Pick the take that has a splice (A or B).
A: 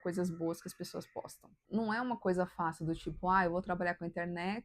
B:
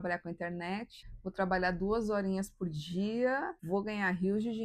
A